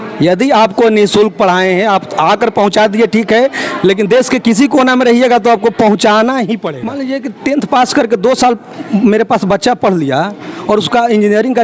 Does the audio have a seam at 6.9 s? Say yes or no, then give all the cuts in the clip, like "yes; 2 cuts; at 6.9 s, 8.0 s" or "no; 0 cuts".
yes; 1 cut; at 6.9 s